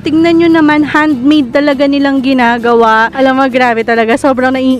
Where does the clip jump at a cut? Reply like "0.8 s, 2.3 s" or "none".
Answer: 3.1 s